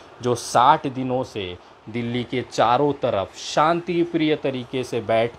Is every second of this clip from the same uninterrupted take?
yes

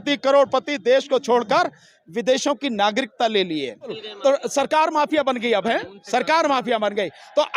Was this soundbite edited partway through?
yes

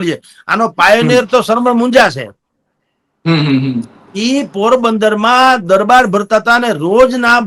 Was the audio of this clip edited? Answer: no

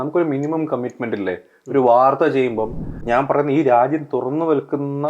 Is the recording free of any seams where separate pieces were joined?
no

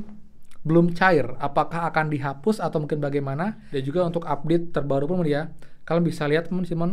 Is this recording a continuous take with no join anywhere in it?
no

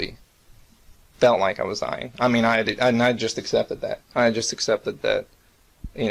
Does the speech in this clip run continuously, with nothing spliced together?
yes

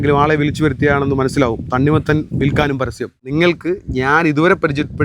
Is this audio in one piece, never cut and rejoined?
no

